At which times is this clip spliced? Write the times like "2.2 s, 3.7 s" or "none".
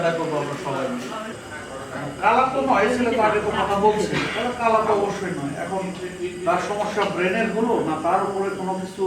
1.3 s